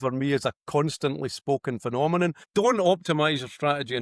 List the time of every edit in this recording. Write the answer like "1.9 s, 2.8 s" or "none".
2.4 s

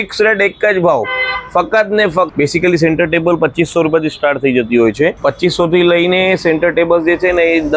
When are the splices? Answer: 2.3 s, 5.2 s

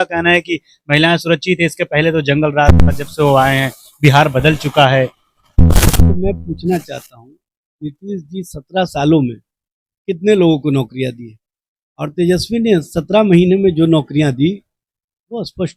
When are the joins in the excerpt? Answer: none

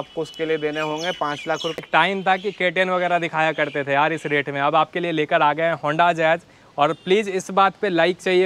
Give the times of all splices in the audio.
1.8 s

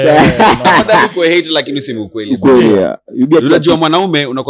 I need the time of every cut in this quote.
none

